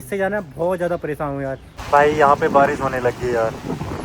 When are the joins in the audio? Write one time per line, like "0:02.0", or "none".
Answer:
0:01.7